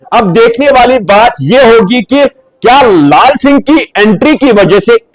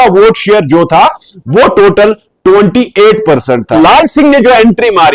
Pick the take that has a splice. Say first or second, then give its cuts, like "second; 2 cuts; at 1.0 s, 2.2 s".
second; 1 cut; at 3.7 s